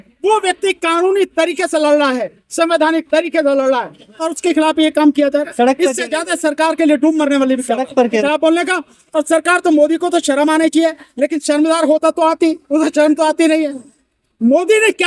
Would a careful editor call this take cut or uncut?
cut